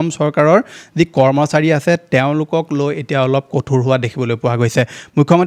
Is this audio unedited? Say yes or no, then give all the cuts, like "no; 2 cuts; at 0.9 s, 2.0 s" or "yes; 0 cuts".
yes; 0 cuts